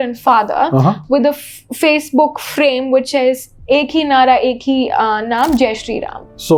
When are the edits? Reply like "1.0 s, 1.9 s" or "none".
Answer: none